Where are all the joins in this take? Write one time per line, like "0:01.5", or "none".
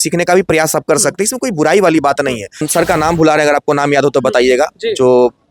0:02.7